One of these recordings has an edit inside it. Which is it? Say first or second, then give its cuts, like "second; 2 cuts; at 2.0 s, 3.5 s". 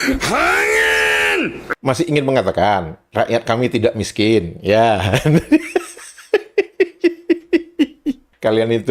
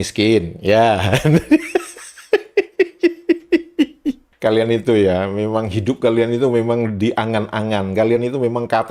first; 1 cut; at 1.7 s